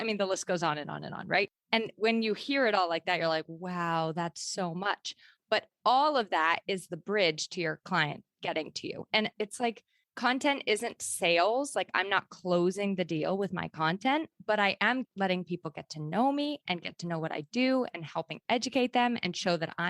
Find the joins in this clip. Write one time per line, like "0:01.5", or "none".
0:15.0